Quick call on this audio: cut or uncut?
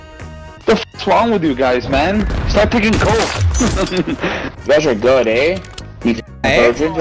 cut